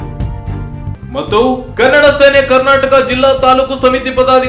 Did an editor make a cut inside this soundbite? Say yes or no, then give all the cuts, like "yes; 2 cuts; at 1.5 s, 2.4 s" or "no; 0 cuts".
no; 0 cuts